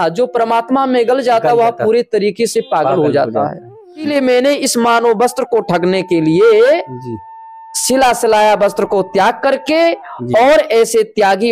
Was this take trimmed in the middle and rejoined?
yes; 1 cut; at 4.1 s

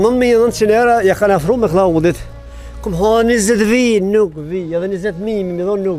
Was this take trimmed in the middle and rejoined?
no; 0 cuts

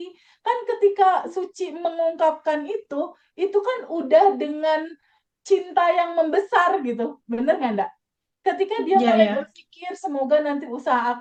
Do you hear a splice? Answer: no; 0 cuts

